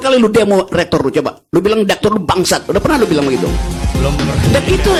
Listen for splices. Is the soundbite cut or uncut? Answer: uncut